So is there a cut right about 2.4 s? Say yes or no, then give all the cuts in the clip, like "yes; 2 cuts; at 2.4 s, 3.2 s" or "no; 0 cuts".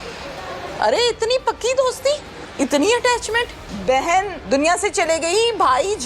yes; 4 cuts; at 0.7 s, 2.4 s, 3.7 s, 4.4 s